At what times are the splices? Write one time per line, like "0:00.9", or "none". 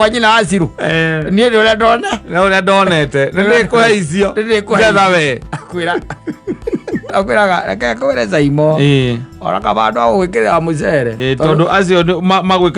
0:07.1
0:11.2